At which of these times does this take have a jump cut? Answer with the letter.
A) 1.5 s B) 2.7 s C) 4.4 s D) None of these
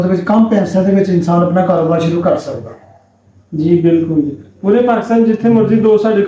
D